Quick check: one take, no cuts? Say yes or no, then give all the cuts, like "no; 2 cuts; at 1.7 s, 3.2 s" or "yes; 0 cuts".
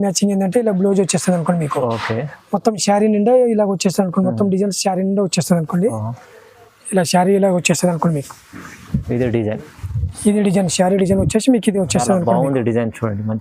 yes; 0 cuts